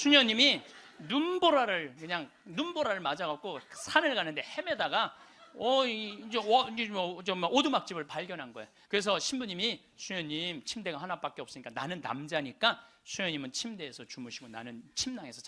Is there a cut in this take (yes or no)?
yes